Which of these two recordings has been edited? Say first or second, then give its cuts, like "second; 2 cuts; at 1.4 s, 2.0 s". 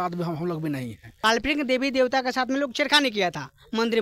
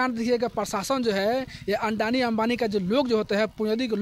first; 1 cut; at 1.0 s